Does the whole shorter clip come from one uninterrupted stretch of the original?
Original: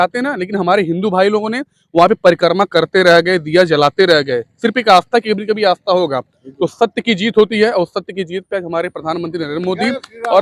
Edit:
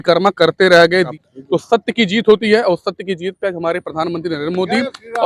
no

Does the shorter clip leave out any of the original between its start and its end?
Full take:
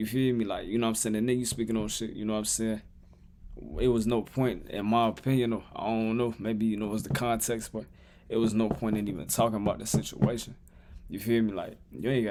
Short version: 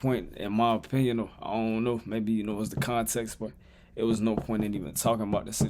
no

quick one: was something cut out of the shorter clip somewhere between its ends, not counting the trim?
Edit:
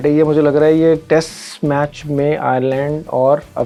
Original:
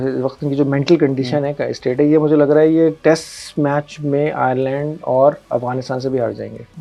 no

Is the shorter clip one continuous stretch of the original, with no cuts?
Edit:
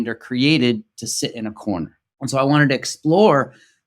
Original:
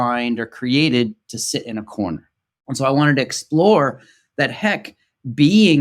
no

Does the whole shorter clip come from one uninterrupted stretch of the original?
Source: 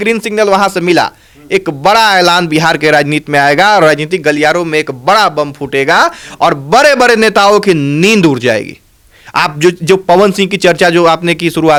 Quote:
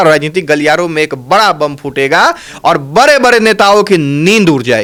yes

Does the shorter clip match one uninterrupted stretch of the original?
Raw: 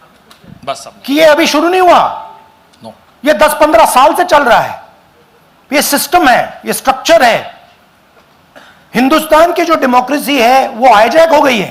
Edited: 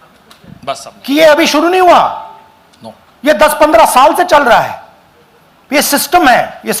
yes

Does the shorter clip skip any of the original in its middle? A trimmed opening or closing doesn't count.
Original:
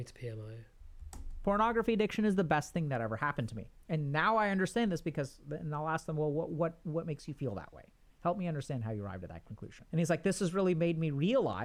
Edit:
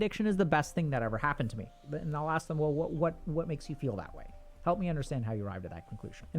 yes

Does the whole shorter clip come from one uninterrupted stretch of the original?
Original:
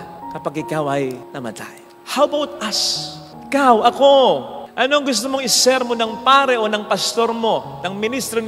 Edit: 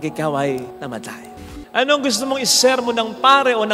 no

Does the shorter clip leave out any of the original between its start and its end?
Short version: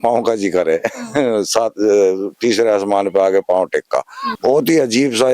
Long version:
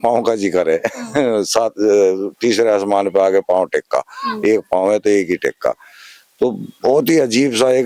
yes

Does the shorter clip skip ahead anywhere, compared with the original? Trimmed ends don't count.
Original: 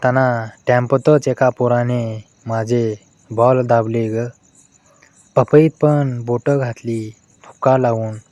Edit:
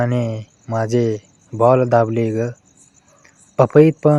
no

